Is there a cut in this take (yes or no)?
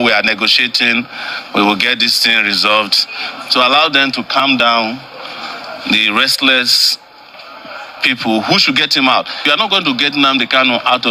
yes